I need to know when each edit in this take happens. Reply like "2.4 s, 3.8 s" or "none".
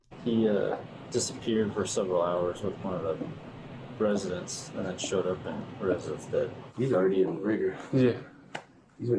0.9 s, 6.6 s